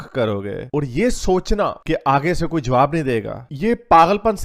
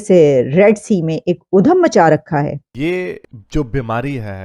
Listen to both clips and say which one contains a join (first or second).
second